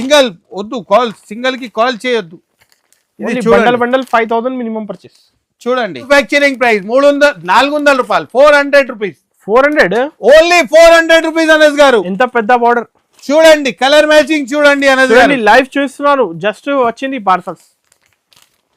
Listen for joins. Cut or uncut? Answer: cut